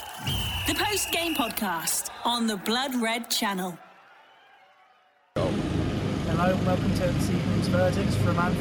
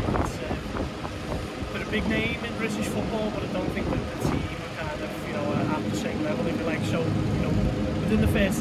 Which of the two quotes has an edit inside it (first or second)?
first